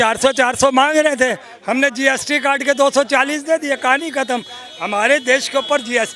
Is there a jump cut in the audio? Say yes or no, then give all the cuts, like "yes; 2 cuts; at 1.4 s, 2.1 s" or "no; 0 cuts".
no; 0 cuts